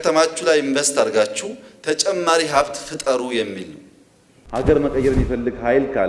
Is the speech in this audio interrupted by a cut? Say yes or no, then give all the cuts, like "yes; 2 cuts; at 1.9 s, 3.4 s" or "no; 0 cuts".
yes; 1 cut; at 4.4 s